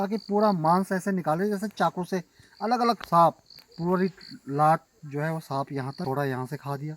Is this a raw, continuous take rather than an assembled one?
no; 2 cuts; at 3.0 s, 6.0 s

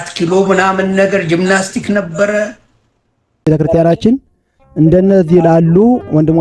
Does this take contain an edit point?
yes; 1 cut; at 3.5 s

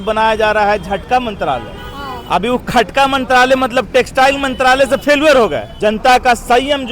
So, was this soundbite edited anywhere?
yes; 1 cut; at 5.7 s

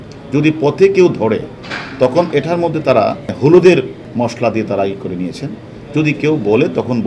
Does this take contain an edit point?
yes; 2 cuts; at 3.3 s, 4.0 s

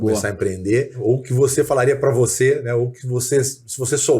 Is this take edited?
yes; 1 cut; at 0.9 s

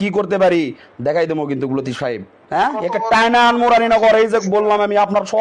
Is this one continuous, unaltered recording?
no; 1 cut; at 2.4 s

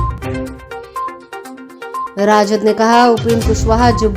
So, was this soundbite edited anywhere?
yes; 1 cut; at 1.5 s

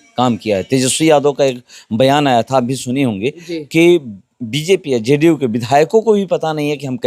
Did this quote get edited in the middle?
no; 0 cuts

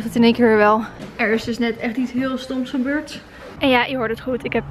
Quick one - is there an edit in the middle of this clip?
yes; 2 cuts; at 1.0 s, 3.5 s

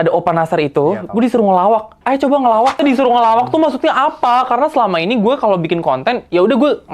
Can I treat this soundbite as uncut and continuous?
no; 1 cut; at 2.8 s

